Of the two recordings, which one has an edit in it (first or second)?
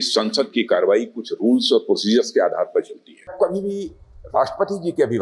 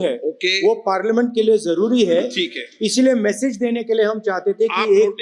first